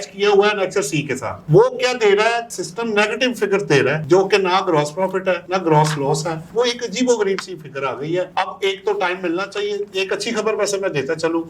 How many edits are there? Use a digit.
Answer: 0